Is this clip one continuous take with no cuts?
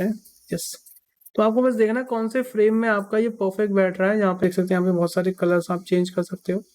no; 1 cut; at 4.4 s

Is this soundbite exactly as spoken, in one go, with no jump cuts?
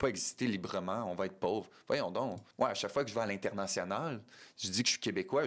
no; 1 cut; at 2.4 s

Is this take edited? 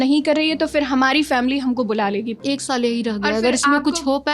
yes; 1 cut; at 2.4 s

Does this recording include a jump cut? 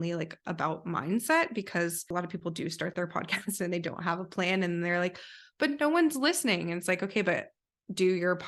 yes; 1 cut; at 2.1 s

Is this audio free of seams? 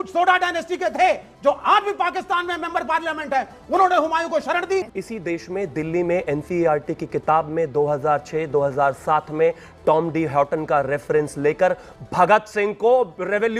no; 1 cut; at 4.9 s

